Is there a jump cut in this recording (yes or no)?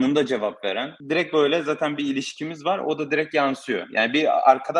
yes